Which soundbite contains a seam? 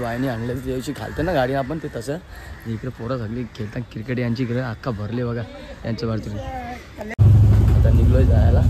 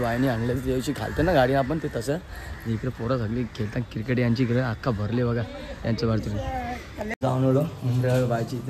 first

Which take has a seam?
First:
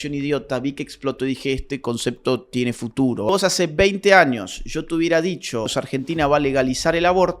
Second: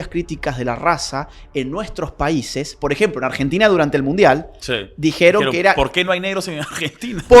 first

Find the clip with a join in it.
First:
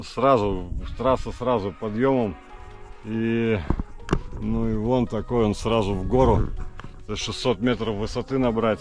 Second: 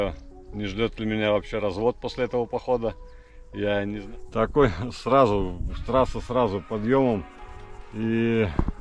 second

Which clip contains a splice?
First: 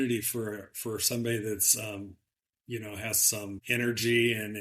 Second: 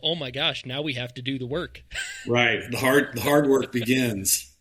first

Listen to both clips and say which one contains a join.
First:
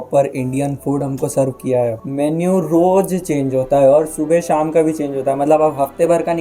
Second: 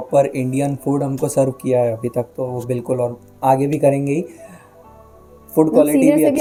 first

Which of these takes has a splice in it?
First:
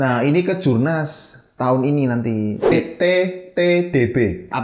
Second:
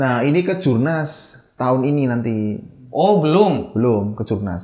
first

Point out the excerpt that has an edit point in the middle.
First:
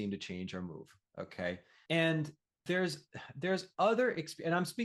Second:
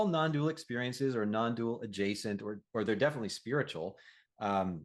first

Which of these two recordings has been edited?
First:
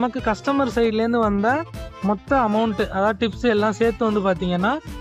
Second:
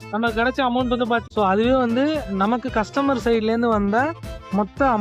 second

